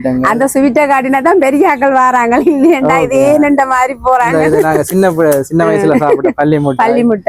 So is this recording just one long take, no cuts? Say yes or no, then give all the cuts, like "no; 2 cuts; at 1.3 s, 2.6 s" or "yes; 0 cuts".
yes; 0 cuts